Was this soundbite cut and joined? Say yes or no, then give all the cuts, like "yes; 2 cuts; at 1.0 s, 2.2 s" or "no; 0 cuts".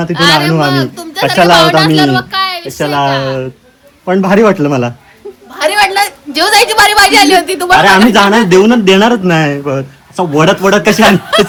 no; 0 cuts